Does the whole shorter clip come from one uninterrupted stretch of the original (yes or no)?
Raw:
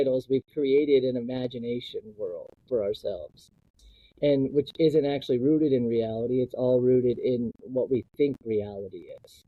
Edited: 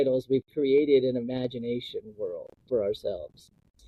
yes